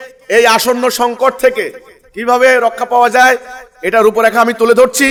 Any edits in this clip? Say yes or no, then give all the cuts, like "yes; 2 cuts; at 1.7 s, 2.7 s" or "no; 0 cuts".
no; 0 cuts